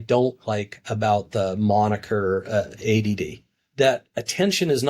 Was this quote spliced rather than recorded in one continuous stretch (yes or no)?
yes